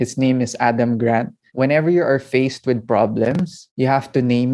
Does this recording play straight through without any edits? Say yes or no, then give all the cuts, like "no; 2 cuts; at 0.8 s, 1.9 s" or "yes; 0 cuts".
no; 2 cuts; at 1.5 s, 3.6 s